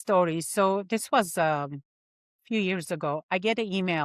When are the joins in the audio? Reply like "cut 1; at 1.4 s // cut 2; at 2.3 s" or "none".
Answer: none